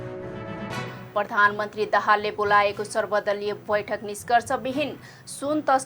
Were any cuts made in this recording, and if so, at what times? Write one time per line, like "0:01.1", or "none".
0:01.0